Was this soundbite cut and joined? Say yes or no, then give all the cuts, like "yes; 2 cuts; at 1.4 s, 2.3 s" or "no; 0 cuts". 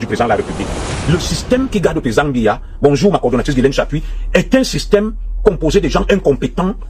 yes; 1 cut; at 0.9 s